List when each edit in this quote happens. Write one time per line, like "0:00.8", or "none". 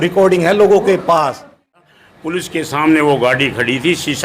0:02.0